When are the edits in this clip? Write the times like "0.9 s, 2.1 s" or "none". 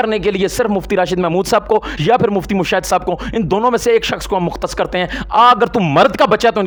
none